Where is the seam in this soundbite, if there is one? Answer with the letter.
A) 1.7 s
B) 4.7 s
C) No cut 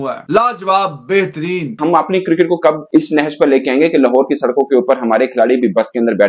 A